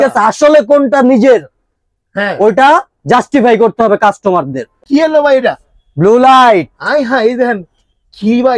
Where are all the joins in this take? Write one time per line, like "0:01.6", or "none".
0:04.8